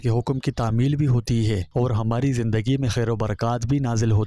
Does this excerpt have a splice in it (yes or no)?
no